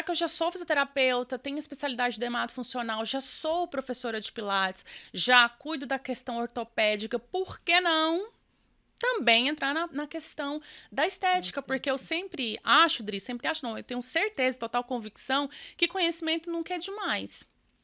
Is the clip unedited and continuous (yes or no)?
yes